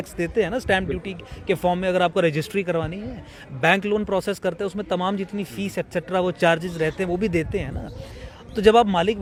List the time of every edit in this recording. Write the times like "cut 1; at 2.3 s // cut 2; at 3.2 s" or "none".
none